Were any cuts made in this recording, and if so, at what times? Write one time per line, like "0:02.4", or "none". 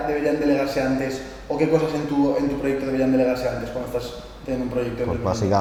none